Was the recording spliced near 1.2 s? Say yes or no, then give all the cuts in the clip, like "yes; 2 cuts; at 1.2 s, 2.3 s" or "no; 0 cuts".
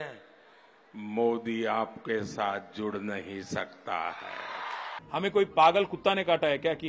no; 1 cut; at 4.9 s